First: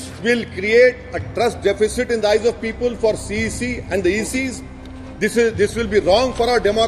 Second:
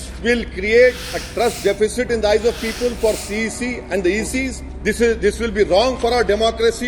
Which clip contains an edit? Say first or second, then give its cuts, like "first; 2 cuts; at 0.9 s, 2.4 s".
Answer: second; 1 cut; at 4.7 s